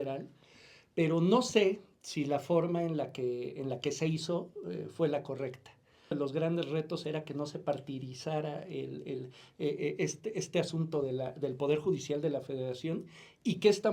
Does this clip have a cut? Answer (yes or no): yes